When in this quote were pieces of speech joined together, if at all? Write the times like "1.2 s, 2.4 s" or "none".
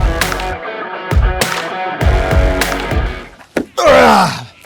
3.1 s